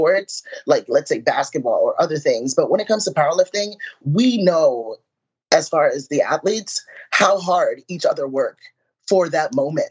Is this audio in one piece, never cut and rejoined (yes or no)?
yes